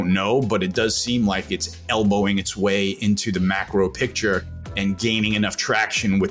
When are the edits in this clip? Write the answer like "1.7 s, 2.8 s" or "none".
none